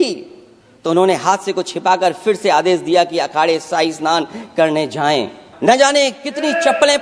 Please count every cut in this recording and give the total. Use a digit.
1